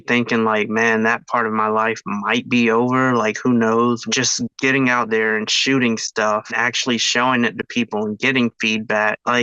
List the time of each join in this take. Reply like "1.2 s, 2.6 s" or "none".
none

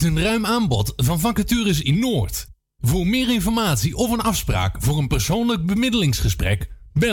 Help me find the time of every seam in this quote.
none

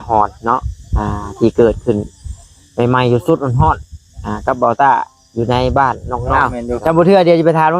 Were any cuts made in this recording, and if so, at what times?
6.4 s

